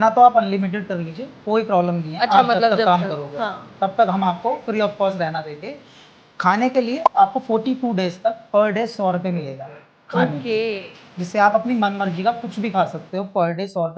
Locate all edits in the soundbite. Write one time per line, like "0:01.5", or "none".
none